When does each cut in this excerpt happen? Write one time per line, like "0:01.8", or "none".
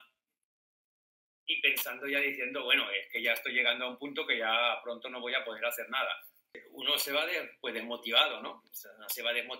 0:06.7